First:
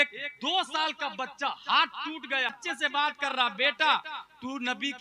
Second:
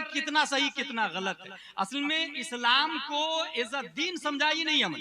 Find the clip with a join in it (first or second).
first